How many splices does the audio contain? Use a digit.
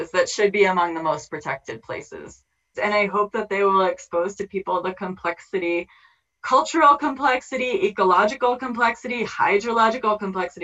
1